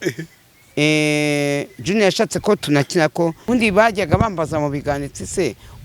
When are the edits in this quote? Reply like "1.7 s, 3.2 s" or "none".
3.4 s